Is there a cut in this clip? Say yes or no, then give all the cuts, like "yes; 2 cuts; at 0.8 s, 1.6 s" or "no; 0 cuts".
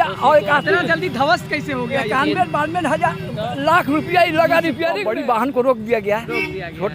yes; 1 cut; at 5.0 s